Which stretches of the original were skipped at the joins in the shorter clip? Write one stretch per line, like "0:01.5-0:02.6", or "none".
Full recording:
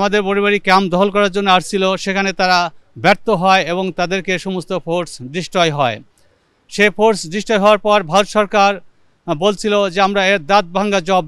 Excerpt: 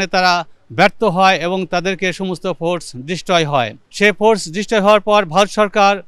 0:06.1-0:06.6